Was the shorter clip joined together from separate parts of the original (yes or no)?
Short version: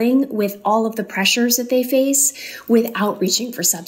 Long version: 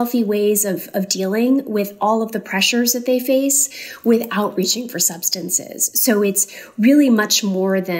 no